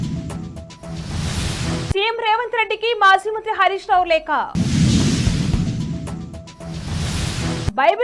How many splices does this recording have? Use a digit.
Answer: 0